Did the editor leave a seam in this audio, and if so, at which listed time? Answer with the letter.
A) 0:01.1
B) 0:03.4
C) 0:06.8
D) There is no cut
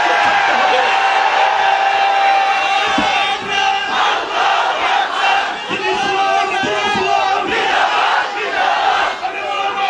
D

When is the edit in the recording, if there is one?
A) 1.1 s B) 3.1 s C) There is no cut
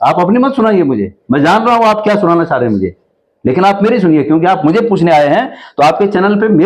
C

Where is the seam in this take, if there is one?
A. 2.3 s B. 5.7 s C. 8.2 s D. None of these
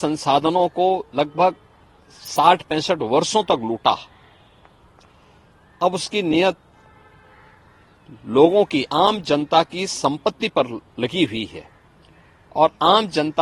D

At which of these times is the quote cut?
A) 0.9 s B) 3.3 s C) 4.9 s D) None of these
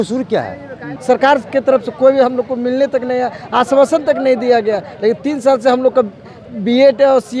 A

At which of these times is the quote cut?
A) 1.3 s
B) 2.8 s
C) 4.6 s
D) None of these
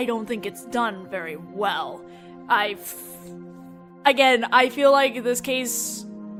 D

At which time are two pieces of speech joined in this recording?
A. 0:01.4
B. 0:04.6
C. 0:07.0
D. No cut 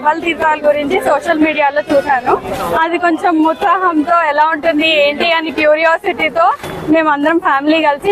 D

